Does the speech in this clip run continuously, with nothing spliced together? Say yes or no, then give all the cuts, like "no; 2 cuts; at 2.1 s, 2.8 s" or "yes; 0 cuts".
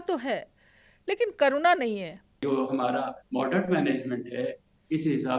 no; 1 cut; at 2.4 s